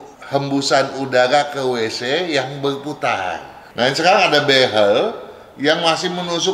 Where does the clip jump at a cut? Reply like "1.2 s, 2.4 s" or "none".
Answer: 3.6 s